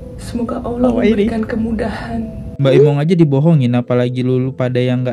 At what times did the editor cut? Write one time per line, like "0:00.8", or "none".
0:02.5

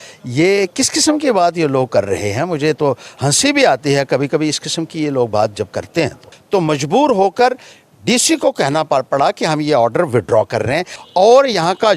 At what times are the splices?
0:06.3
0:10.9

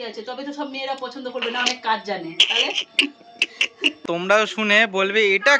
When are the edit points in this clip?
0:02.4
0:04.0

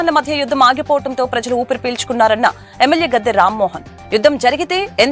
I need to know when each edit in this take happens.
none

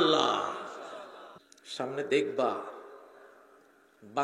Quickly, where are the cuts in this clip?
0:01.4

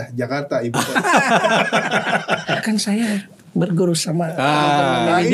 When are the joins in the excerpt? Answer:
0:02.6

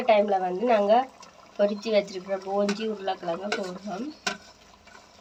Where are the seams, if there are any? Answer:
none

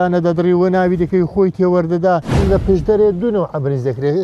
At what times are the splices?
0:02.4

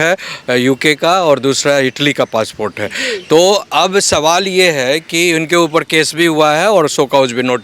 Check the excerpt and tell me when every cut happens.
none

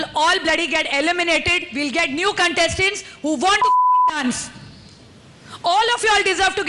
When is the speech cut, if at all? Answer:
none

